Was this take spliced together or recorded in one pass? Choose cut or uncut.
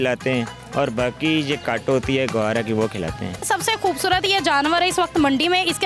cut